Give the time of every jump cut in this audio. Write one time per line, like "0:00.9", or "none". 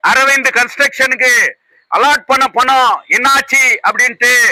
none